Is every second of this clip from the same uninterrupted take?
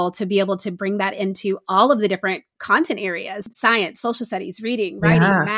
no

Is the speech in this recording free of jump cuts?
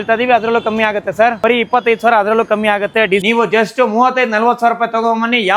no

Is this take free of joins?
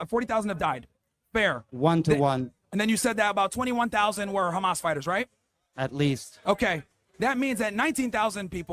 no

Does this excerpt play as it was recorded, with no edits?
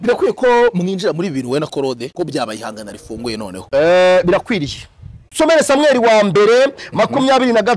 no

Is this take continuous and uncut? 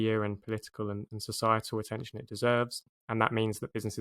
no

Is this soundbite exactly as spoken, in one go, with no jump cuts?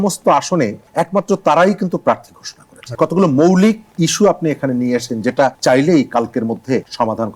no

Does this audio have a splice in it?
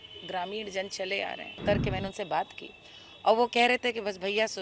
yes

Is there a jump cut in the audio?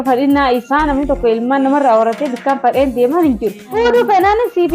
yes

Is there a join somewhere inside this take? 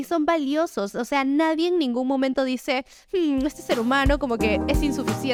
no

